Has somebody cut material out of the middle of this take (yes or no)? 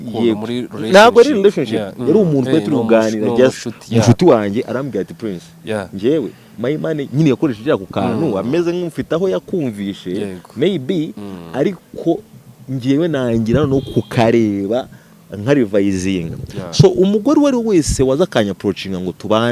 no